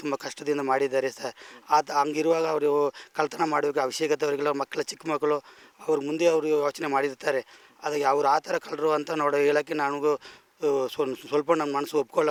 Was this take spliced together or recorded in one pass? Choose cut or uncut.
uncut